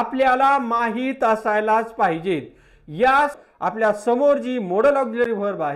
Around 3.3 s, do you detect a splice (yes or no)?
yes